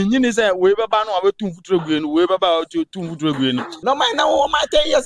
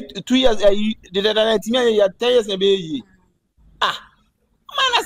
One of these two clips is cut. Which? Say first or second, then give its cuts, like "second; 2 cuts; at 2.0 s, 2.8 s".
first; 1 cut; at 3.7 s